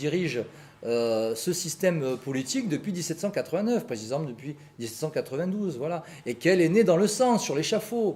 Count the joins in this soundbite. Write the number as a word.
zero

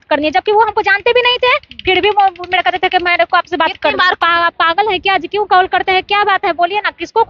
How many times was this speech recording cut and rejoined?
one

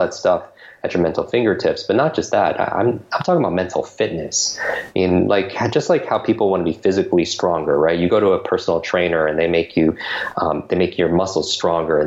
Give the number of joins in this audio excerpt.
zero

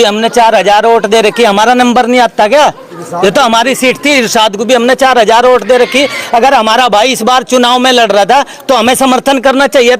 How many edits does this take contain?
zero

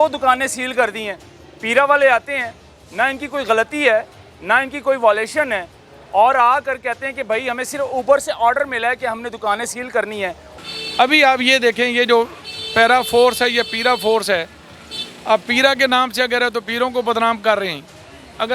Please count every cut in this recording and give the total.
one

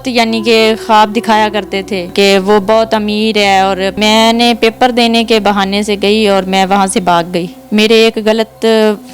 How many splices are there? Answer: three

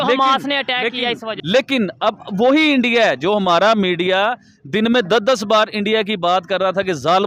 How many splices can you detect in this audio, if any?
one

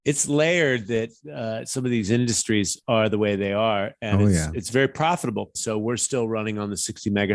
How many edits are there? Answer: one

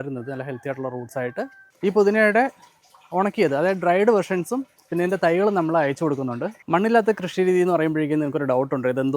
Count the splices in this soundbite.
two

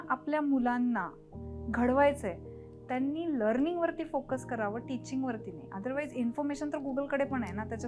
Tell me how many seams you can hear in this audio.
zero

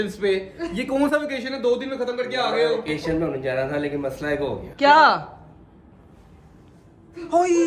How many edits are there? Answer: zero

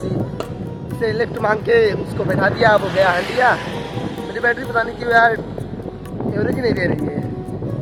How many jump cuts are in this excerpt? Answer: zero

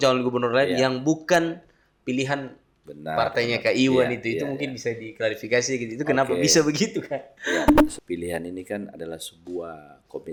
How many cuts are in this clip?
zero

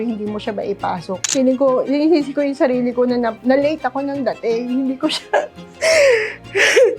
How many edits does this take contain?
one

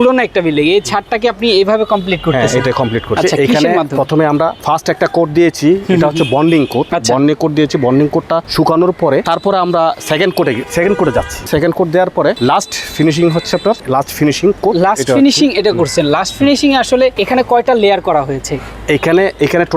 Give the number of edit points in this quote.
eight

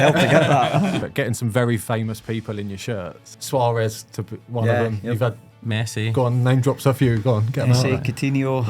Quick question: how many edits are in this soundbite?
two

